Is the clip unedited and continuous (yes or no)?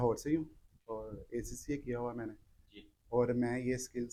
yes